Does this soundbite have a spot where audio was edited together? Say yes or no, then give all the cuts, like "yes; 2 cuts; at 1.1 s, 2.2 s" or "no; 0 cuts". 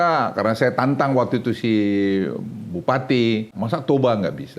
yes; 1 cut; at 3.5 s